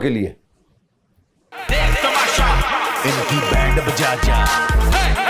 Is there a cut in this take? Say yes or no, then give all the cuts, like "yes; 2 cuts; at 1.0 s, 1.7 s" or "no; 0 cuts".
yes; 1 cut; at 1.4 s